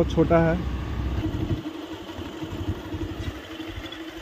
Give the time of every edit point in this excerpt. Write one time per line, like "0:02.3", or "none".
0:01.2

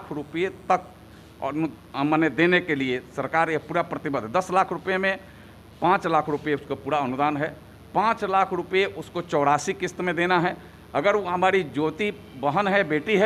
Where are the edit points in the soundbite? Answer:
none

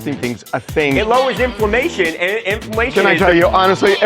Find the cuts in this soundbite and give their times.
0:01.0
0:02.9

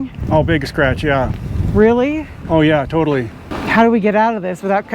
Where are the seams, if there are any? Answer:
0:03.6

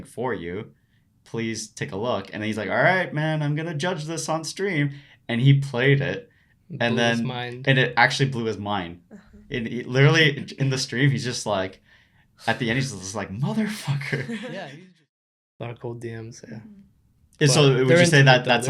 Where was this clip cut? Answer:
0:15.4

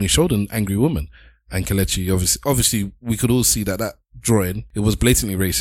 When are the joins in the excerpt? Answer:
0:04.6

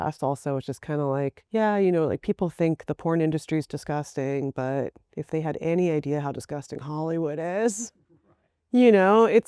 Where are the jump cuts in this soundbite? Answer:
0:01.4

